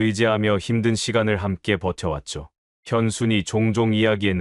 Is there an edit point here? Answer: no; 0 cuts

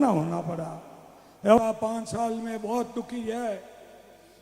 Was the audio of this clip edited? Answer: yes; 1 cut; at 1.6 s

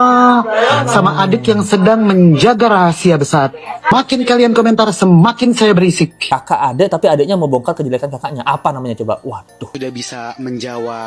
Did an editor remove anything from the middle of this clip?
yes; 3 cuts; at 3.9 s, 6.2 s, 9.7 s

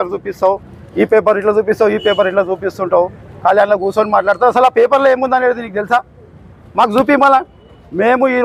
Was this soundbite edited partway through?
no; 0 cuts

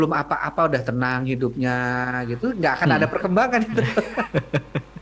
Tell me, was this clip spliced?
no; 0 cuts

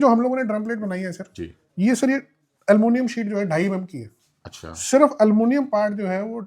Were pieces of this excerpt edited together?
no; 0 cuts

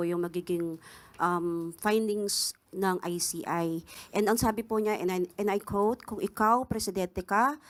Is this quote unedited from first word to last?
yes; 0 cuts

